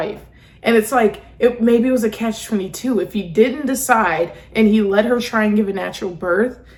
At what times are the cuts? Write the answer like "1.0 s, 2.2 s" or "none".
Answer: none